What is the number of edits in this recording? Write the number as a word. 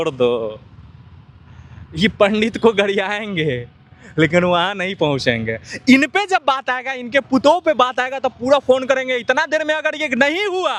zero